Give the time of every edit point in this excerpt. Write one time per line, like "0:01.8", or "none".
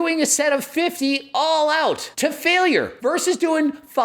0:02.1
0:02.9